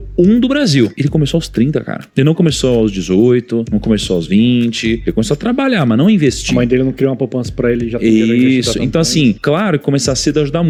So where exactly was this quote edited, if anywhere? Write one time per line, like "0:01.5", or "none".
none

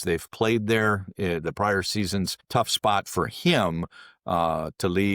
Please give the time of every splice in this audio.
0:02.5

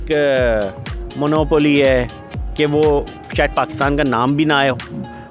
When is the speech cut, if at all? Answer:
none

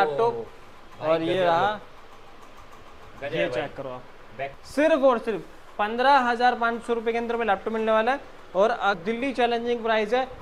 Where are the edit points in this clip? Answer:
0:04.5
0:08.9

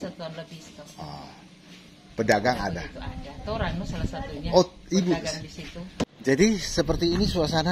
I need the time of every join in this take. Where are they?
0:06.2

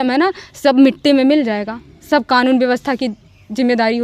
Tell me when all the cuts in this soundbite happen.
none

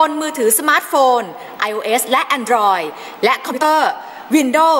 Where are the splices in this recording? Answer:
0:03.6

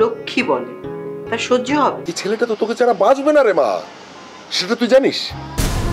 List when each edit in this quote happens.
0:02.1

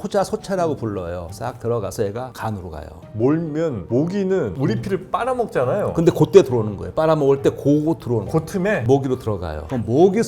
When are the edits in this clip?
0:03.1
0:08.8

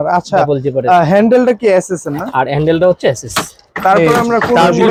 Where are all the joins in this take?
none

